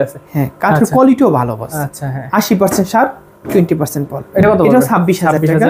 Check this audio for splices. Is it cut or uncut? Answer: uncut